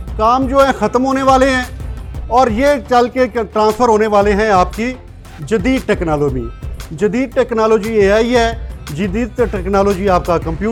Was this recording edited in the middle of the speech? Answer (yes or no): no